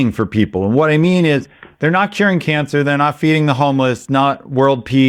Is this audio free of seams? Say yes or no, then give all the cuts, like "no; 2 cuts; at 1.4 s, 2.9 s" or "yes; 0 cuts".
yes; 0 cuts